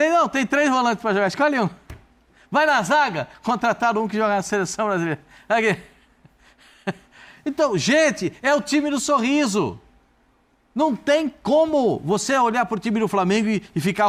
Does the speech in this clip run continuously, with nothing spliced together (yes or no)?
yes